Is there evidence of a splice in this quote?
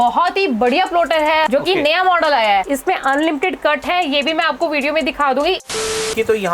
yes; 3 cuts; at 1.5 s, 2.7 s, 5.7 s

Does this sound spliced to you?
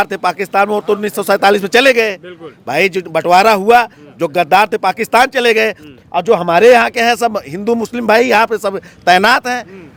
no; 0 cuts

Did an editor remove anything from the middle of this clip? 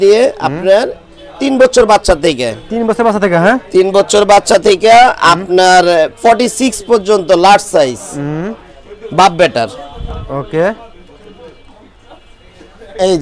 no; 0 cuts

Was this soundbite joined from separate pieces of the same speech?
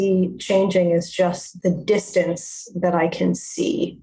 yes; 1 cut; at 1.5 s

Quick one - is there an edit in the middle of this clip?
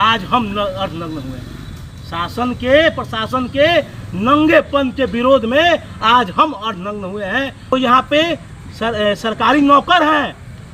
yes; 1 cut; at 7.7 s

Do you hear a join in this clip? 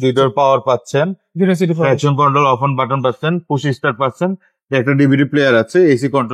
no; 0 cuts

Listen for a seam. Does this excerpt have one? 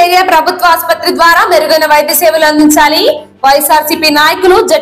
no; 0 cuts

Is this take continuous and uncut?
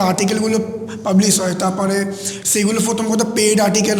yes; 0 cuts

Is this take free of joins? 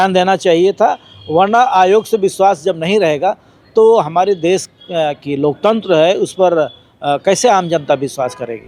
yes; 0 cuts

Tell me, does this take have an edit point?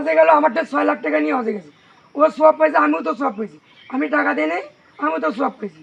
no; 0 cuts

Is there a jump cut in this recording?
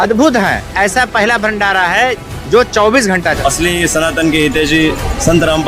yes; 1 cut; at 3.4 s

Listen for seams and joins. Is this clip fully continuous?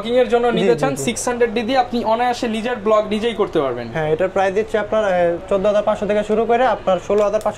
yes; 0 cuts

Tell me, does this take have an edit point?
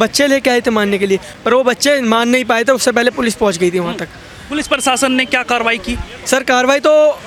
no; 0 cuts

